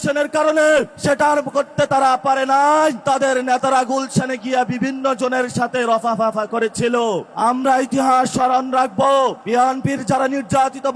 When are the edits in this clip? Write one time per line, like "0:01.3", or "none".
0:00.9
0:03.0
0:07.3
0:09.4